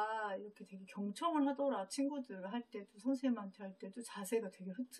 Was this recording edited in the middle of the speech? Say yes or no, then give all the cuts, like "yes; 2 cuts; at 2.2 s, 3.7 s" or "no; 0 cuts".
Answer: no; 0 cuts